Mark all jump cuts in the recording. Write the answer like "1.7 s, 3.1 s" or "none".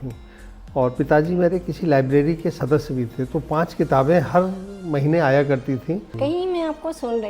6.1 s

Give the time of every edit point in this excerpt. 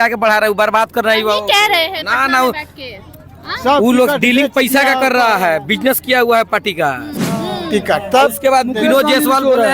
7.1 s

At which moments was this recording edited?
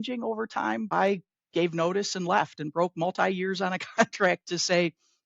0.9 s

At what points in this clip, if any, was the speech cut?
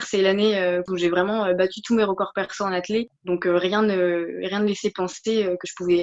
0.9 s

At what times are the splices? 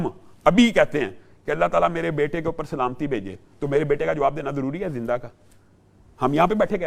none

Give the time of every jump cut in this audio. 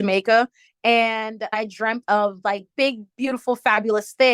1.5 s

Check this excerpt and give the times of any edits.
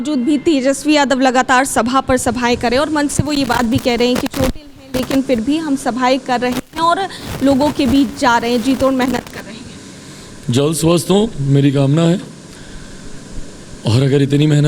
none

